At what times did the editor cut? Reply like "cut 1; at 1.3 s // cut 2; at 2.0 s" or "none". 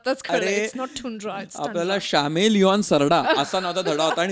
none